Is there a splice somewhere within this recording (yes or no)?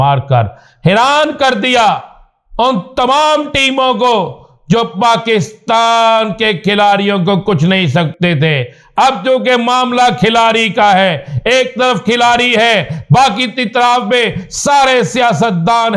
no